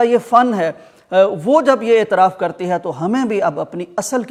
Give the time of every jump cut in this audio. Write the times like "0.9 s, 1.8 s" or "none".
none